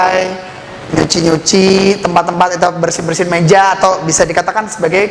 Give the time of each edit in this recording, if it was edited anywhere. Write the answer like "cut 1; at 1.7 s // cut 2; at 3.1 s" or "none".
none